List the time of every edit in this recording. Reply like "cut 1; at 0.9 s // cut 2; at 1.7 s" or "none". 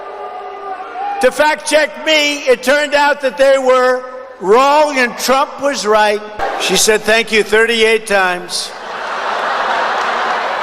cut 1; at 6.3 s